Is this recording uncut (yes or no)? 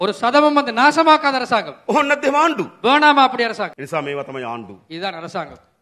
no